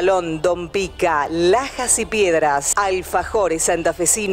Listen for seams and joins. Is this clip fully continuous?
no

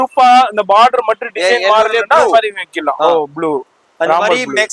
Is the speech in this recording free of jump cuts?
yes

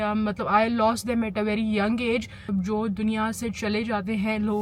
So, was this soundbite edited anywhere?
yes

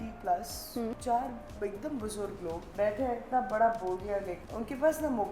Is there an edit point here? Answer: yes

